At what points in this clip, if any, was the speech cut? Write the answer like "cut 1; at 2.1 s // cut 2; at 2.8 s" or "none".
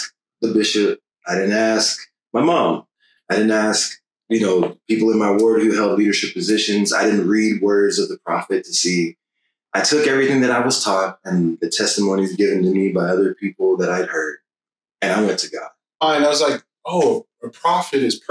cut 1; at 16.0 s